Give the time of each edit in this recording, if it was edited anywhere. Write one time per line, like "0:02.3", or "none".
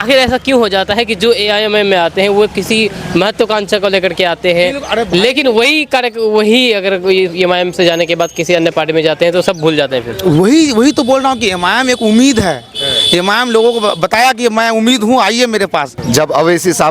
0:15.9